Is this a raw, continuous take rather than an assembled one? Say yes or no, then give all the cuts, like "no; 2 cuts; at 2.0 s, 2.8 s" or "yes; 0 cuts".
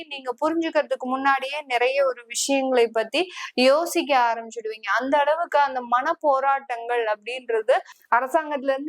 no; 1 cut; at 7.9 s